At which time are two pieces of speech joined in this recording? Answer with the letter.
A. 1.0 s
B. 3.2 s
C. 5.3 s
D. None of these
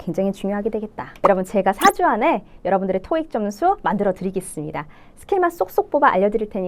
A